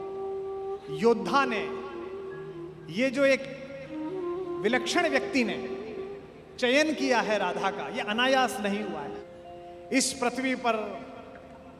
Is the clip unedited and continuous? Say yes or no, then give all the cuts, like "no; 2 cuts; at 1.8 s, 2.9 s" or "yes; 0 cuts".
yes; 0 cuts